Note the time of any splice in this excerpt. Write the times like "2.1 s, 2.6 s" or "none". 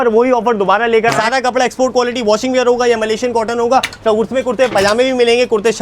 1.2 s